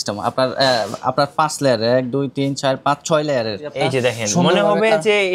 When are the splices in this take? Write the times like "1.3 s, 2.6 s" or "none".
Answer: 3.7 s